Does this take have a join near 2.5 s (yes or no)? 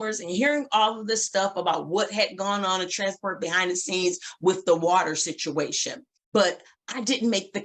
no